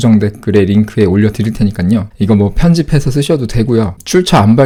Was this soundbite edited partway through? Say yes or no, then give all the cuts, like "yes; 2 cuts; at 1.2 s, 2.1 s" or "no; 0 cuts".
no; 0 cuts